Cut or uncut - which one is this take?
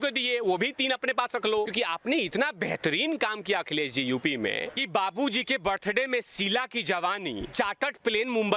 cut